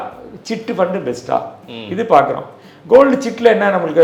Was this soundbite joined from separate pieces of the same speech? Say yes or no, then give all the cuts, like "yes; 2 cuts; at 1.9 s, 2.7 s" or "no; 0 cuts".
no; 0 cuts